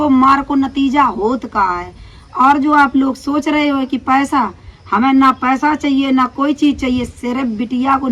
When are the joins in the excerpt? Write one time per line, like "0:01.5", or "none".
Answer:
none